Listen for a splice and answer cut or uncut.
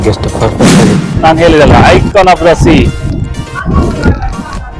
cut